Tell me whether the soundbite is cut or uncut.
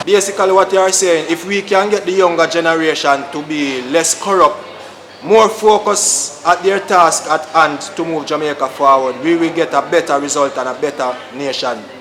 cut